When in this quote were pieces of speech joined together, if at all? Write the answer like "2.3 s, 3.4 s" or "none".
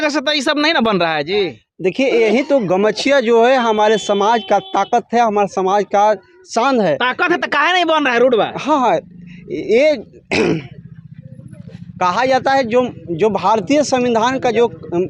none